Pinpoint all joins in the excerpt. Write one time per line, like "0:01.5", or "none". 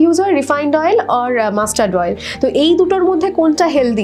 none